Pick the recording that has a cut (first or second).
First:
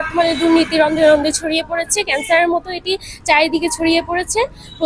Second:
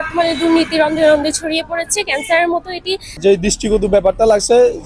second